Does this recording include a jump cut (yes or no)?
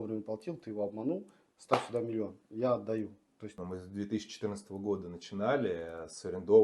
yes